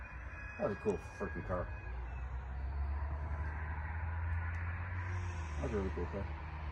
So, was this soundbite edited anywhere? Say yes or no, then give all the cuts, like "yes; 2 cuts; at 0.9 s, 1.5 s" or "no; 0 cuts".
no; 0 cuts